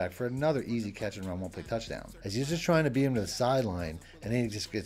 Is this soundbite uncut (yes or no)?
no